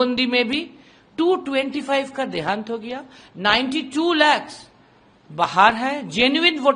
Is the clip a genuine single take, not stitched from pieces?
yes; 0 cuts

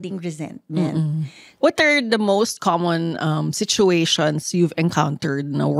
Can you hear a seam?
yes; 1 cut; at 1.4 s

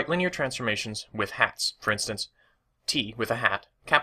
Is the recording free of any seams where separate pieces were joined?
yes; 0 cuts

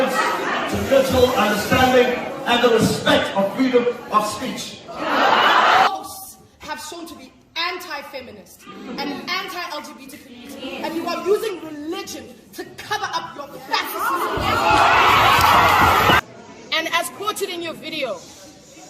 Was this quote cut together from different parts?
yes; 2 cuts; at 5.9 s, 16.2 s

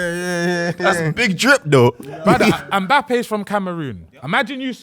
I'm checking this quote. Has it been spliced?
yes; 1 cut; at 2.7 s

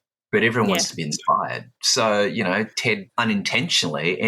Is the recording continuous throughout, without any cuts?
no; 1 cut; at 3.1 s

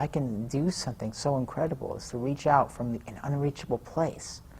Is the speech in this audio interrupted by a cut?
no; 0 cuts

